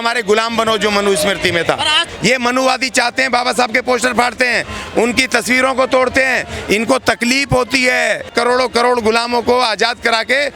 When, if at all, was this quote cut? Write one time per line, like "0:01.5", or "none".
0:02.1
0:08.3